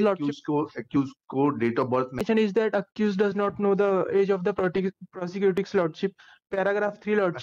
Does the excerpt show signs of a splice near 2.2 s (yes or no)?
yes